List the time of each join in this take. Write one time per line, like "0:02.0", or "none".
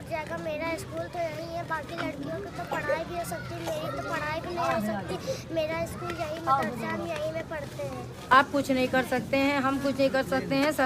0:08.3